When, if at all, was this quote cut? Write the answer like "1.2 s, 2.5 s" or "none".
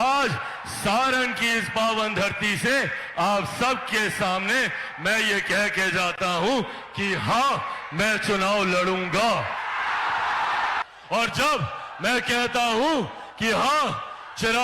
10.8 s